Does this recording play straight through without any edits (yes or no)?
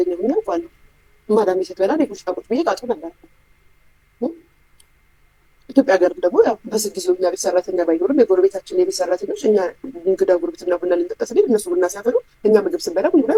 yes